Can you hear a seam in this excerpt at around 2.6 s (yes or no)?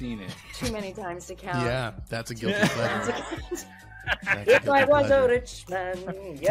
no